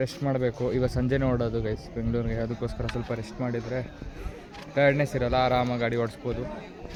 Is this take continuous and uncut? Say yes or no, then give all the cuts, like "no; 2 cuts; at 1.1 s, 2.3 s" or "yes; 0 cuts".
yes; 0 cuts